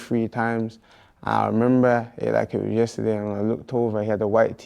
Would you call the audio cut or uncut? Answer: cut